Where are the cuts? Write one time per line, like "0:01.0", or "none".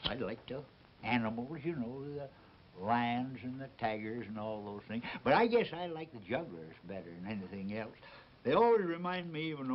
0:01.6